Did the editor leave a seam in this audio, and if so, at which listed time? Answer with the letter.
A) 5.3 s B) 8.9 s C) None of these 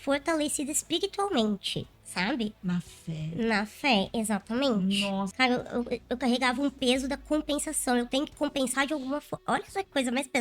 A